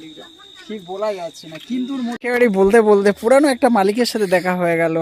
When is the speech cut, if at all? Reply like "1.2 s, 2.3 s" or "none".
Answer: 2.1 s